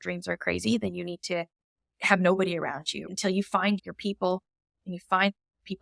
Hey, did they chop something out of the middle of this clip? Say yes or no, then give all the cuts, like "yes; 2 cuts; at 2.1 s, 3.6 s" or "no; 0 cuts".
yes; 2 cuts; at 3.1 s, 3.8 s